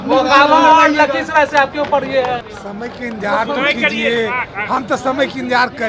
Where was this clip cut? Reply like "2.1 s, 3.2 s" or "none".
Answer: 2.5 s

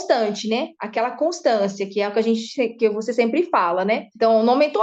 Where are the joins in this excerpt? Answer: none

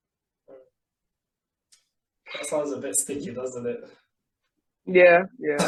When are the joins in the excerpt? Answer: none

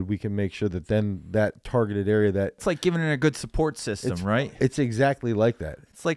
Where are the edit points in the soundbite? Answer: 2.6 s, 4.4 s

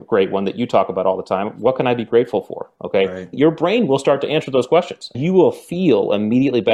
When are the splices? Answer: 3.3 s, 5.1 s

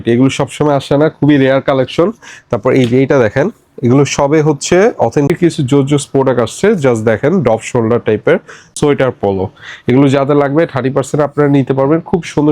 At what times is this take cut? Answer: 5.3 s, 8.7 s

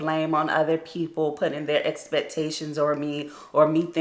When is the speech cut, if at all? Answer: none

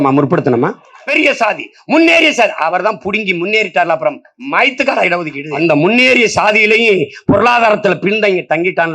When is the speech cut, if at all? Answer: 1.1 s, 5.5 s

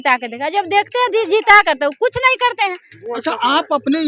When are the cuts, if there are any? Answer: none

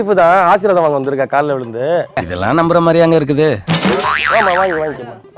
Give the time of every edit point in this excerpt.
none

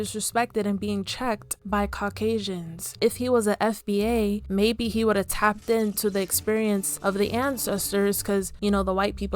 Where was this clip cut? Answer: none

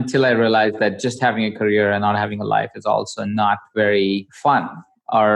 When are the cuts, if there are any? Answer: 4.3 s

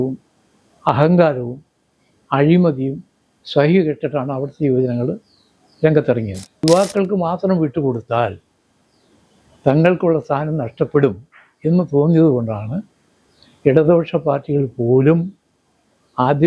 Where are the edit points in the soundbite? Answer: 6.6 s

